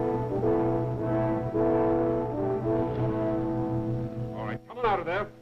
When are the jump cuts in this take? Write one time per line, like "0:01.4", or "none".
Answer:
none